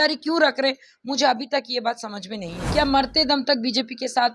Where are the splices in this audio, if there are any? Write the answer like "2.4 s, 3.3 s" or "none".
2.6 s